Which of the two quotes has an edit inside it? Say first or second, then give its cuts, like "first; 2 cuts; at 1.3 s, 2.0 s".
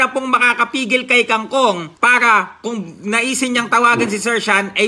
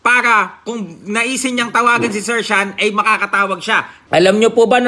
second; 1 cut; at 3.9 s